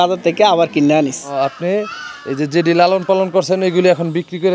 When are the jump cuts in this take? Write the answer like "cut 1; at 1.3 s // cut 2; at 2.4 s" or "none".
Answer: none